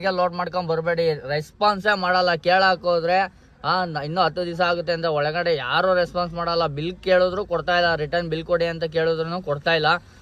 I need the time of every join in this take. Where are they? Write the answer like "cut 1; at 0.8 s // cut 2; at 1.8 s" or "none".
none